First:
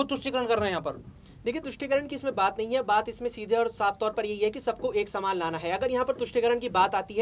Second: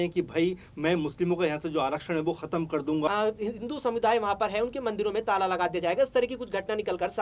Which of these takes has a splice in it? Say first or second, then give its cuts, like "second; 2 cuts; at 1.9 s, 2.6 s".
second; 1 cut; at 3.1 s